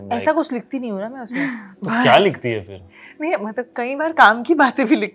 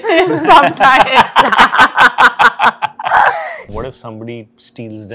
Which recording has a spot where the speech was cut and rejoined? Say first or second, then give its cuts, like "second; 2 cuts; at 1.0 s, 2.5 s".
second; 1 cut; at 3.7 s